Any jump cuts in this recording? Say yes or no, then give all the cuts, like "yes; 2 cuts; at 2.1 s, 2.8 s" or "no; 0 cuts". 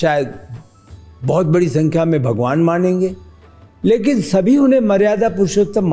no; 0 cuts